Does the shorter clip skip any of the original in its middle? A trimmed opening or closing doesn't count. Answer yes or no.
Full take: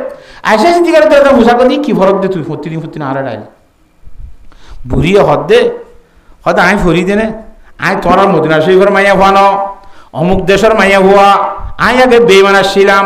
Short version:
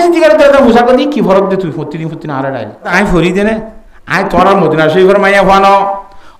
yes